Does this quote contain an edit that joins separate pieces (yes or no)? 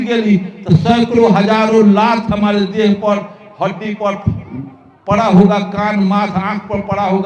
no